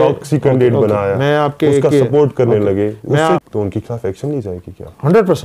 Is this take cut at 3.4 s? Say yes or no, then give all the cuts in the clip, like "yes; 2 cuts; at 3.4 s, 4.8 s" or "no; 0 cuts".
yes; 1 cut; at 3.4 s